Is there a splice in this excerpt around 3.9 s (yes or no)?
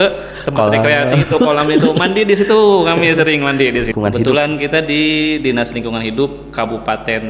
yes